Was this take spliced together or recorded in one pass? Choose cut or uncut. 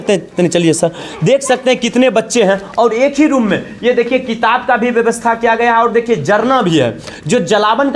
uncut